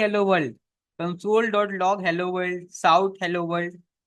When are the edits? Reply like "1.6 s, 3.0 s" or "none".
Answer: none